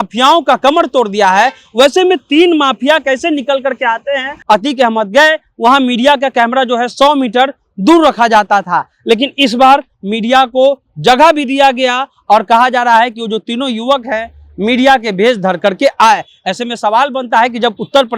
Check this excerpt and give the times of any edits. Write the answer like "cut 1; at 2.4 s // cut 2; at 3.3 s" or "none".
cut 1; at 4.3 s